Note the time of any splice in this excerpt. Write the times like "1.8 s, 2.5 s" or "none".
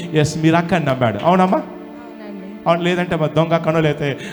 none